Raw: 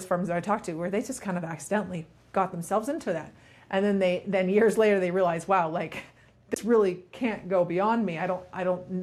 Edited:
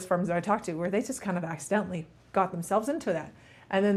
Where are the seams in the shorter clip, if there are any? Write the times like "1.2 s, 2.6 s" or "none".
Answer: none